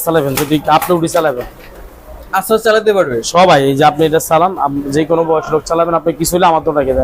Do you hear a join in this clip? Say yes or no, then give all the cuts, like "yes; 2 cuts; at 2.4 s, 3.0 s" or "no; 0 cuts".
no; 0 cuts